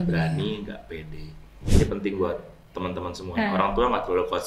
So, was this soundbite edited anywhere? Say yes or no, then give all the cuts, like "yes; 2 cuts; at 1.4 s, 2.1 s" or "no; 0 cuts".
yes; 1 cut; at 1.6 s